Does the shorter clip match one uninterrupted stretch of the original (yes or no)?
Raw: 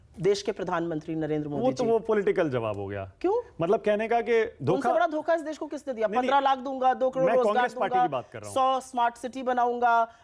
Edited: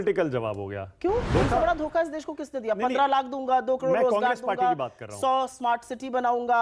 no